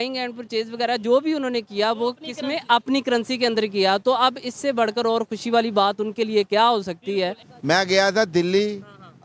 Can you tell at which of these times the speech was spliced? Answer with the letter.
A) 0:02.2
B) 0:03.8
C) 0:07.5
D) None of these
C